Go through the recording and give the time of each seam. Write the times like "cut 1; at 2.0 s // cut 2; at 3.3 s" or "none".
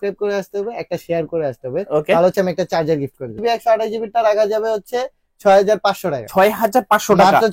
cut 1; at 3.4 s

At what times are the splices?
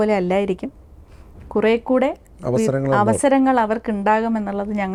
none

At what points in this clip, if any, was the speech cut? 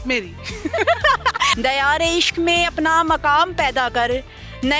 cut 1; at 1.5 s

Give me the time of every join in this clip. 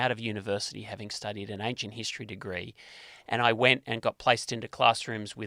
none

